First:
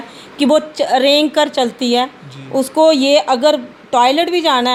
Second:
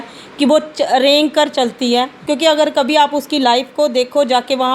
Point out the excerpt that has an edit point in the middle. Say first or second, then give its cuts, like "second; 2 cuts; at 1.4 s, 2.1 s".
second; 1 cut; at 2.2 s